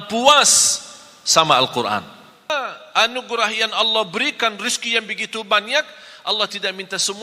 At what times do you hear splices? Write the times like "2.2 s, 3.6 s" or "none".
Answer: 2.5 s